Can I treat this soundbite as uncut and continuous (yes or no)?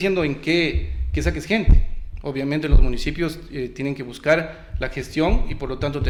yes